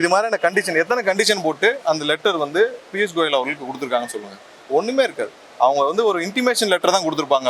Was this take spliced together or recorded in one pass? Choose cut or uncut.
uncut